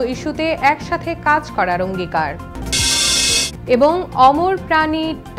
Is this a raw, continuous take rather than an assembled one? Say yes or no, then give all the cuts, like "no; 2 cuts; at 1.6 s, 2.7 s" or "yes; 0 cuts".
no; 1 cut; at 2.4 s